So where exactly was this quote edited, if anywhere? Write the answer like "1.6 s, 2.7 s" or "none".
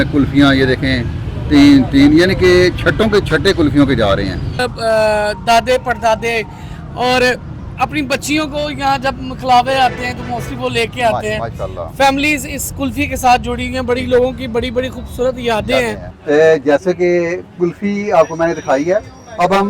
4.6 s, 16.1 s